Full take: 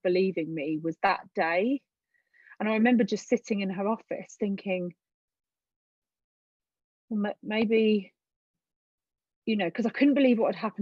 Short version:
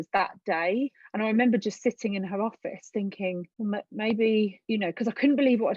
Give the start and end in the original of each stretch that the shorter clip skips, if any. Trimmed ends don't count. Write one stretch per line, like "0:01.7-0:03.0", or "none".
0:01.9-0:02.5
0:05.0-0:07.0
0:08.1-0:09.4